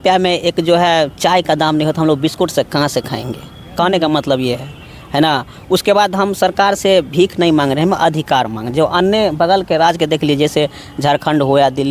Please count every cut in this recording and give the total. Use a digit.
0